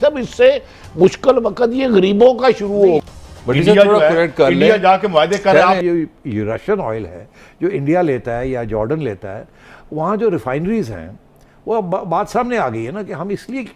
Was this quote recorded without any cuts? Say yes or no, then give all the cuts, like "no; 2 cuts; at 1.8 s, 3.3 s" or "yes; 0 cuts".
no; 2 cuts; at 3.0 s, 5.8 s